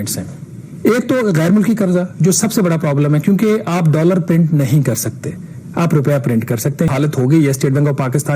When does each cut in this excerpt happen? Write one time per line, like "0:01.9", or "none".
0:06.9